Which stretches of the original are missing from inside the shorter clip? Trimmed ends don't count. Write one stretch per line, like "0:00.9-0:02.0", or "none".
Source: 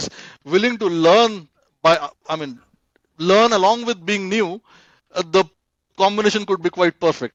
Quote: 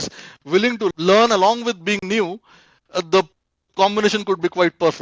0:00.9-0:03.1